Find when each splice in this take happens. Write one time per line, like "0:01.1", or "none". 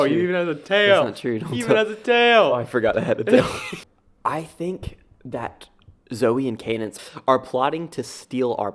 0:03.6
0:07.0